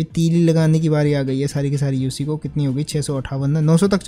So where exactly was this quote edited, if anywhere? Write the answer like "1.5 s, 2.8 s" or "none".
none